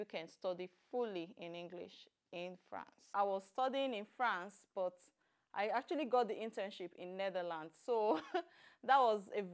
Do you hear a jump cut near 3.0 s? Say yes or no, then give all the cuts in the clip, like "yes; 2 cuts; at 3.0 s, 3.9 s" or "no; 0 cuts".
yes; 1 cut; at 3.0 s